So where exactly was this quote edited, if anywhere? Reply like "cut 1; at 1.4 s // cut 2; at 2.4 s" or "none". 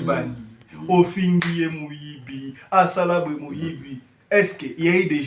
none